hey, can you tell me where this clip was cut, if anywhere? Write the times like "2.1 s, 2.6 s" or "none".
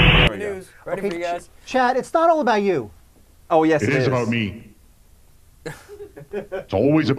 4.2 s